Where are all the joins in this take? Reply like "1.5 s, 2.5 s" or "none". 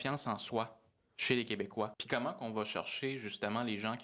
2.0 s

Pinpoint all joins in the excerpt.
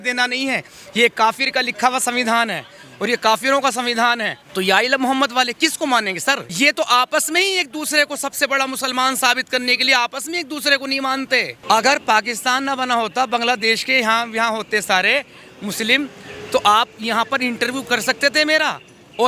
4.4 s, 6.5 s, 11.5 s

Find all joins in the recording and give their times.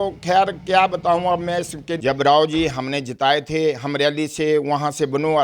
1.8 s

